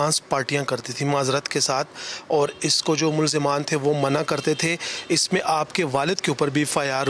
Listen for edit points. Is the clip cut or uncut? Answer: uncut